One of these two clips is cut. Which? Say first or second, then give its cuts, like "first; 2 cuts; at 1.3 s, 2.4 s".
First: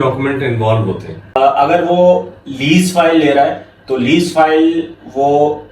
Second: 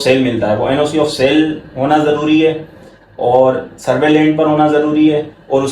first; 1 cut; at 1.4 s